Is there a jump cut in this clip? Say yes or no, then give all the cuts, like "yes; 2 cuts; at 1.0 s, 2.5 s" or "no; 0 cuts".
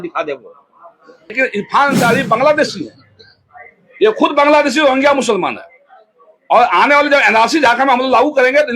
yes; 1 cut; at 1.4 s